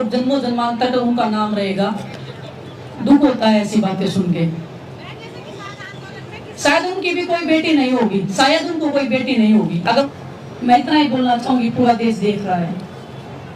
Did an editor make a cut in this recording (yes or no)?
yes